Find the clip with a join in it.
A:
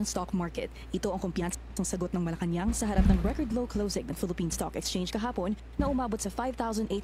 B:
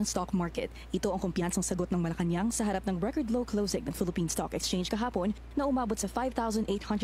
B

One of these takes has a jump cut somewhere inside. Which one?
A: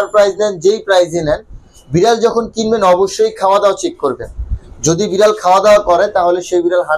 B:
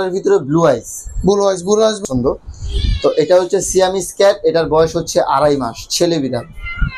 B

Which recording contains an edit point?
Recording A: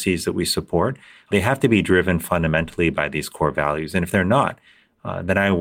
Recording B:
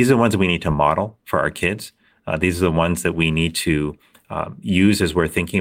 A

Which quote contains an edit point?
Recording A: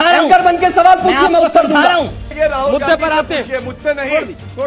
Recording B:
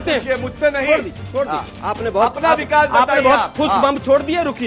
A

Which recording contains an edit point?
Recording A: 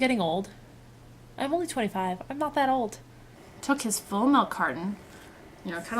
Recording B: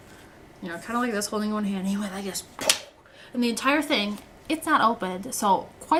A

